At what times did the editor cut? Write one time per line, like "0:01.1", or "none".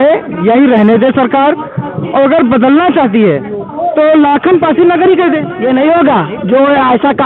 0:05.5

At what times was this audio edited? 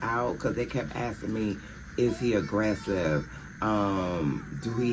none

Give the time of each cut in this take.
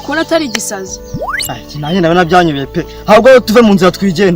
none

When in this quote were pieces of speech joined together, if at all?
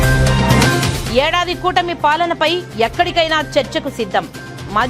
0:00.9

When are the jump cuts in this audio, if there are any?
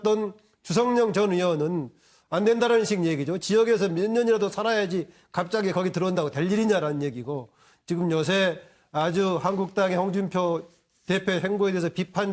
0:08.4

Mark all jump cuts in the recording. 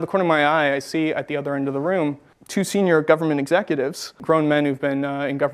0:04.2

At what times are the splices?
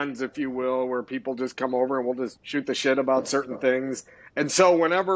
0:02.4

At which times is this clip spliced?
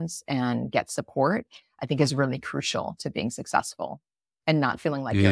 none

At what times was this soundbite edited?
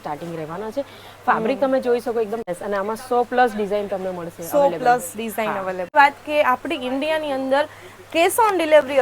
0:02.5
0:05.9

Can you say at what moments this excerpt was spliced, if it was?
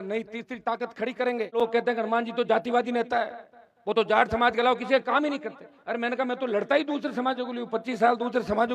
0:01.6

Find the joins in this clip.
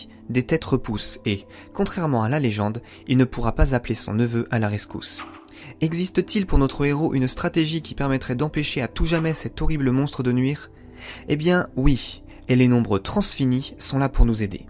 0:11.4

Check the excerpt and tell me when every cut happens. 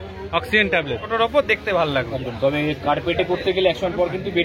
0:01.3

